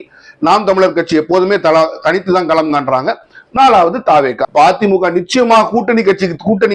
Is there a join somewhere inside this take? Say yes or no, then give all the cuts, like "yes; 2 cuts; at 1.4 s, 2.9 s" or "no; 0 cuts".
yes; 1 cut; at 4.4 s